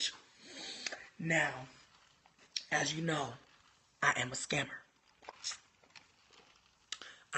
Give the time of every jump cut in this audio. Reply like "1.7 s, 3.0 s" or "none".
none

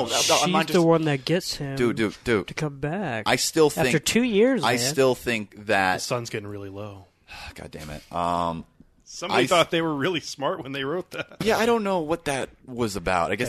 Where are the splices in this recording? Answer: 11.3 s

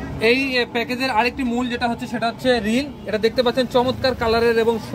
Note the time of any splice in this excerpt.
none

